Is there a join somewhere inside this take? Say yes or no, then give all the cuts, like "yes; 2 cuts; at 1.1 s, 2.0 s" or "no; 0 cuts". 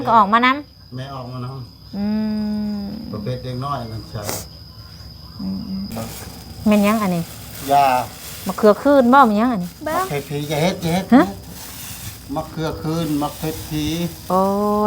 yes; 1 cut; at 5.9 s